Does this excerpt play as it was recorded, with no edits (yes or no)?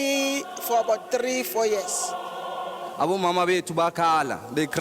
no